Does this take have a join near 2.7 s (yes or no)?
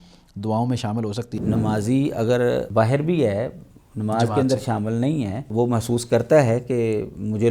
yes